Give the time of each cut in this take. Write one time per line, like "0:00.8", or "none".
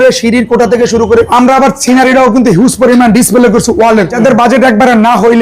0:01.3
0:04.1